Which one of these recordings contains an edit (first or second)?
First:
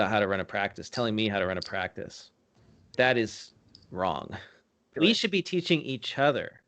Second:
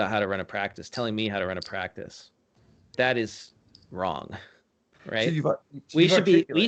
first